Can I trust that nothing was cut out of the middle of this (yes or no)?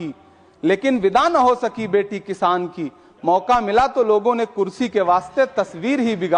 yes